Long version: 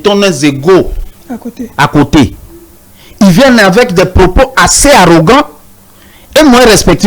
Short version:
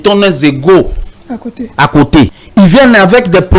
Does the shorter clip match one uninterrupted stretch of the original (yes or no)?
no